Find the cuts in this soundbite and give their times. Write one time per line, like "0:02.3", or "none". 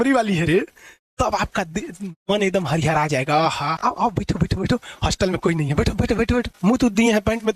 0:03.8
0:06.5